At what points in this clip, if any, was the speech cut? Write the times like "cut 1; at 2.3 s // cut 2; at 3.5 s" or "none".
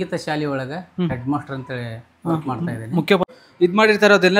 cut 1; at 3.2 s